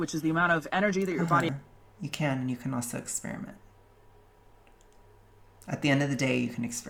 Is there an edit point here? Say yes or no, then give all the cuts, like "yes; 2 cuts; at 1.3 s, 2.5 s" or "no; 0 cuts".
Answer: no; 0 cuts